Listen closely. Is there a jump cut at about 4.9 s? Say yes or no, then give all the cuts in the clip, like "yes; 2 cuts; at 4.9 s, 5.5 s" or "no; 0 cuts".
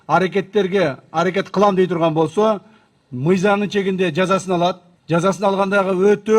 yes; 1 cut; at 4.9 s